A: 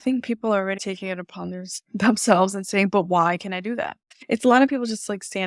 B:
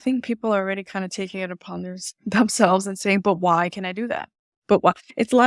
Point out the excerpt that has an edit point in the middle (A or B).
A